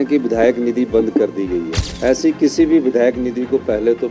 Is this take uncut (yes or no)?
no